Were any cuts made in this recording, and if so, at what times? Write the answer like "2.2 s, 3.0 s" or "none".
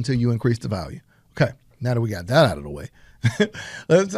none